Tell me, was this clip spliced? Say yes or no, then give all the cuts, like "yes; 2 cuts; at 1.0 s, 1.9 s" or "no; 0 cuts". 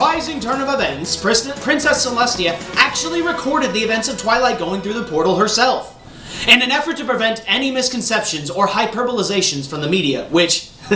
yes; 1 cut; at 1.2 s